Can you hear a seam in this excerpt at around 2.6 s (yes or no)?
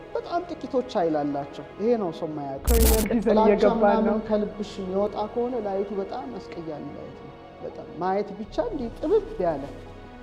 yes